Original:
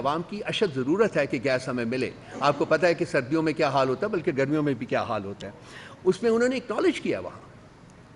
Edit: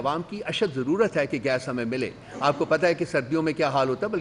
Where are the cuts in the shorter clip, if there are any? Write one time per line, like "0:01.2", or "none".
none